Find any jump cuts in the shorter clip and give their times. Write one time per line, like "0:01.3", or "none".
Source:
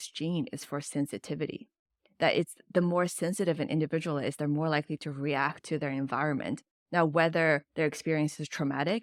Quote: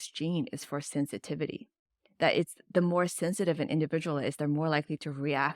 none